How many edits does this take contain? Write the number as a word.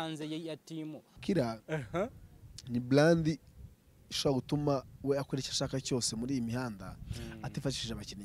one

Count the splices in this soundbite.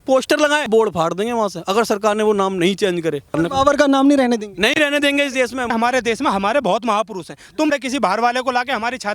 two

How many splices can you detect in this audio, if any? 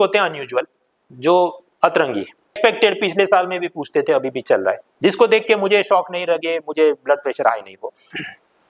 one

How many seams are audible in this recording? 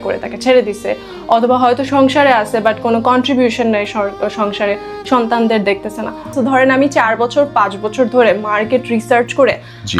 one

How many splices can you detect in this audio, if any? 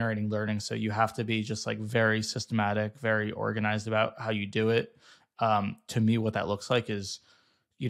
zero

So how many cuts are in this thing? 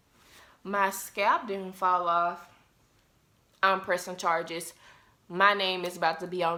zero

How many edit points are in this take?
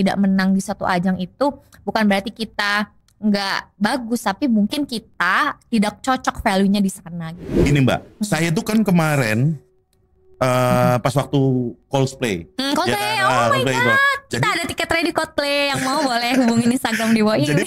one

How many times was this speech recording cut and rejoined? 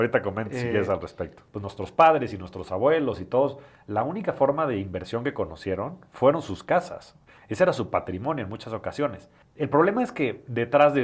one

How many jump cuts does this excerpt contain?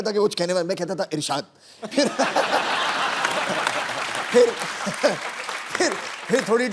zero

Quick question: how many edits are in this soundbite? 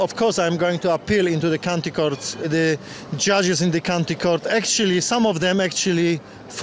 one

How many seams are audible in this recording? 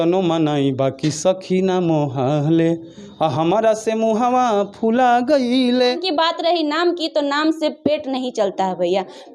one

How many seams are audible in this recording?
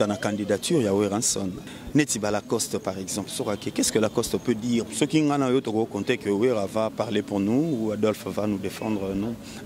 two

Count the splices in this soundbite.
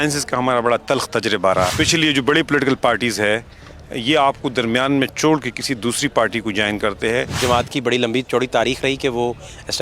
two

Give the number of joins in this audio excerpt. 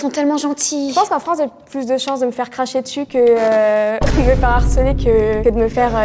zero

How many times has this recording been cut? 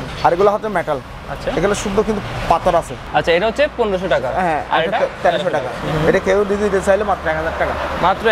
two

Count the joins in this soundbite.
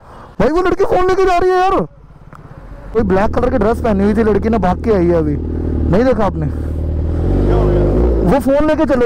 one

